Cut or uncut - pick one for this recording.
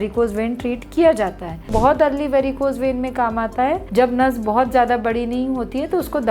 cut